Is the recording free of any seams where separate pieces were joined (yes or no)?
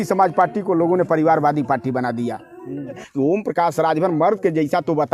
no